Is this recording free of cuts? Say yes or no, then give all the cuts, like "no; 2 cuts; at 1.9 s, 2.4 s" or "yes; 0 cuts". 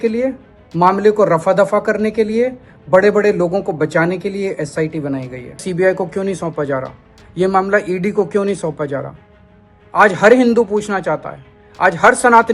no; 1 cut; at 5.6 s